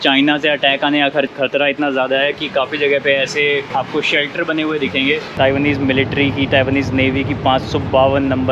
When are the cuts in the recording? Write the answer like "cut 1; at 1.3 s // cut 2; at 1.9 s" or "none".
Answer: cut 1; at 1.3 s // cut 2; at 3.7 s // cut 3; at 5.4 s